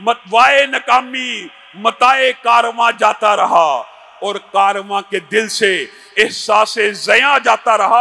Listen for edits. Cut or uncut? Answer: uncut